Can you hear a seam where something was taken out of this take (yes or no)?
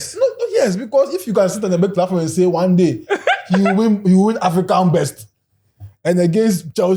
no